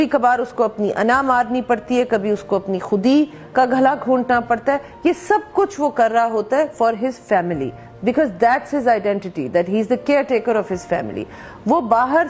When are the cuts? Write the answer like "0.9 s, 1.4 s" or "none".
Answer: none